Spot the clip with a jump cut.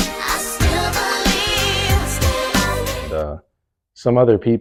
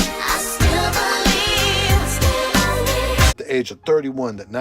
second; 1 cut; at 3.1 s

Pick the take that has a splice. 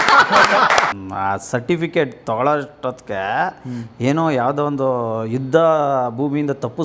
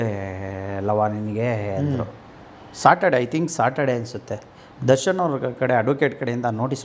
first; 1 cut; at 1.0 s

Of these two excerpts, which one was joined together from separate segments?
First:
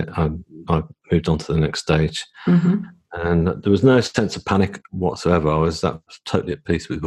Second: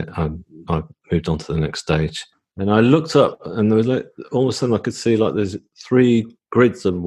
second; 1 cut; at 2.2 s

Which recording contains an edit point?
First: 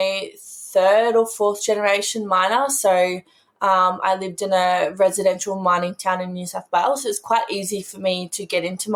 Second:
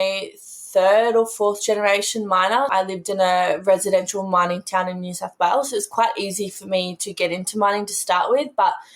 second; 1 cut; at 2.7 s

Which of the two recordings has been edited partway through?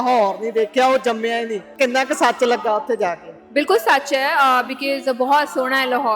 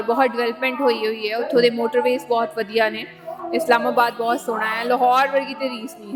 first; 1 cut; at 1.7 s

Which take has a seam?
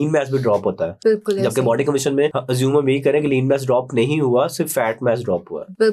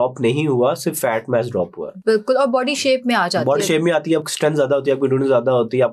first; 2 cuts; at 0.9 s, 2.4 s

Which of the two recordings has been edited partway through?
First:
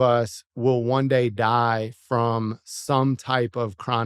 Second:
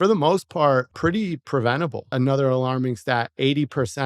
second; 2 cuts; at 0.9 s, 2.1 s

